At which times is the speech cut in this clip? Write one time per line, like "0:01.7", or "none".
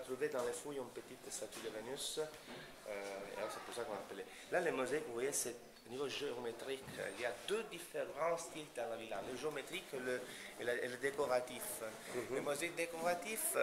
0:07.4